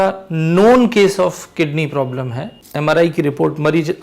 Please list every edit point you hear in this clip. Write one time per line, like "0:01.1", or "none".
0:02.6